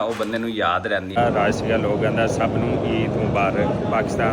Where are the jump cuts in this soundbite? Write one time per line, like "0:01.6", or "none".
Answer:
0:01.2